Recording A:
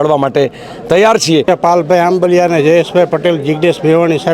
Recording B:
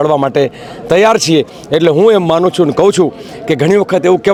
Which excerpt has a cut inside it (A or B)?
A